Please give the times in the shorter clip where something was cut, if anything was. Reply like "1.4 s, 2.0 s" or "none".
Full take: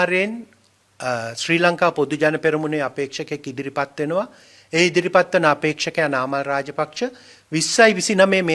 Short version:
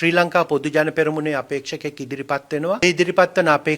2.8 s